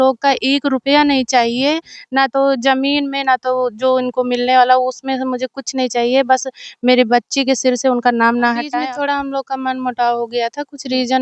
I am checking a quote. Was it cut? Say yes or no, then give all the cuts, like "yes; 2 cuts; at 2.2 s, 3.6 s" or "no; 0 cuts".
yes; 1 cut; at 8.7 s